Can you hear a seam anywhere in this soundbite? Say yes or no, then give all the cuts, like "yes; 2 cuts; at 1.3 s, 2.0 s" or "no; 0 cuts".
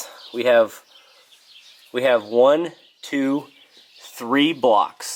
no; 0 cuts